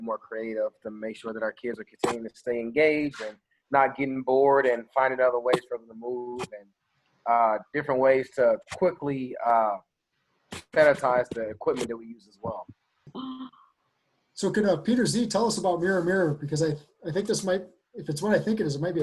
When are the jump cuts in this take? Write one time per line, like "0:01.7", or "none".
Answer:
0:13.1